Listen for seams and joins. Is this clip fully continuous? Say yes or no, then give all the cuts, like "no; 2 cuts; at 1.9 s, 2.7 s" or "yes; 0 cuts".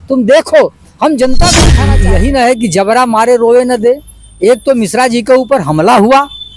no; 1 cut; at 1.8 s